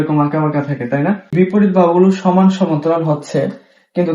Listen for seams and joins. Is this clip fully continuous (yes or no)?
no